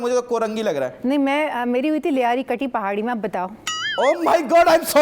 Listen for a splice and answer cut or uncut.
uncut